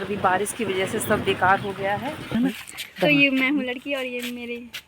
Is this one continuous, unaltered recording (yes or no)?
no